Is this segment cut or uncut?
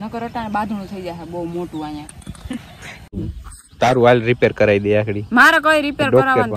cut